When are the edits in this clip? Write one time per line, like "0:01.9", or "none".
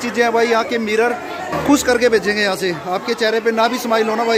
0:01.5

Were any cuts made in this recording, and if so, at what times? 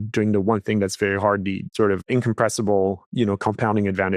0:01.6
0:03.1

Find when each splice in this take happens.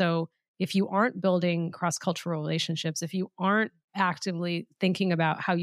none

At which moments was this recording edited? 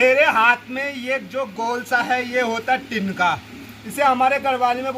none

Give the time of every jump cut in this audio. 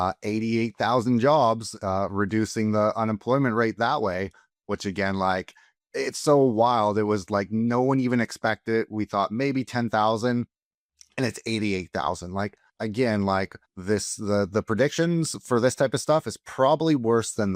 none

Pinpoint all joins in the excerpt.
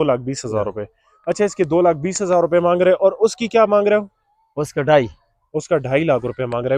none

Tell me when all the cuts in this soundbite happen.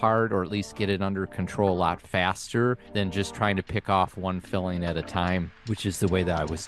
0:02.8
0:05.6

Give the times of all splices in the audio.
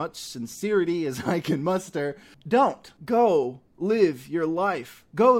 0:02.3
0:02.8

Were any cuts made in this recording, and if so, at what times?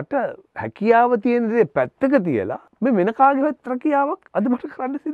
0:02.6
0:04.2

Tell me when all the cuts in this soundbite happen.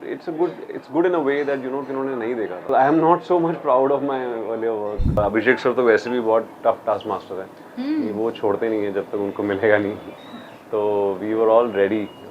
0:02.7
0:05.2

